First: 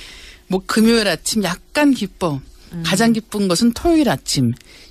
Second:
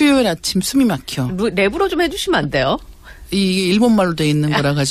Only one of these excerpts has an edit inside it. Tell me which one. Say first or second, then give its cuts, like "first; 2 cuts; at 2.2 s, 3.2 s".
second; 1 cut; at 2.7 s